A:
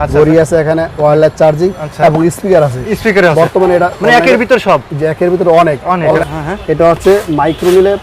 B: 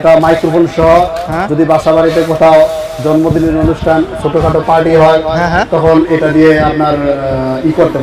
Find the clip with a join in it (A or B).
A